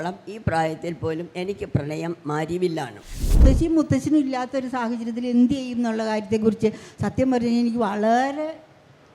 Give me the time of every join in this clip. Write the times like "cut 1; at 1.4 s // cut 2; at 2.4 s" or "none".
cut 1; at 3.4 s